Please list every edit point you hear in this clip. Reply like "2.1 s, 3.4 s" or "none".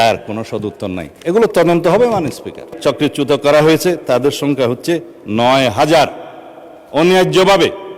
2.7 s